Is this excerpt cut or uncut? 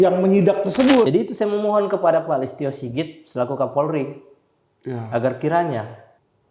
cut